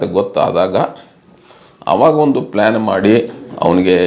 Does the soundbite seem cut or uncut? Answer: uncut